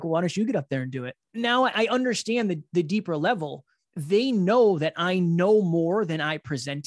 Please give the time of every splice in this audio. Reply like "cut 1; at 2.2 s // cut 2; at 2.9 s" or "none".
cut 1; at 1.1 s